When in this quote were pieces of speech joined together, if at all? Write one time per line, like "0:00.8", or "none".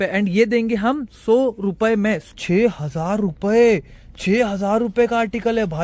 0:02.2